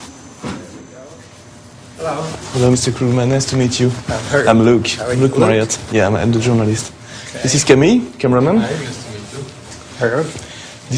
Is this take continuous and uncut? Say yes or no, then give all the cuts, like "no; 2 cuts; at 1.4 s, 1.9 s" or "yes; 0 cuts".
no; 1 cut; at 4.6 s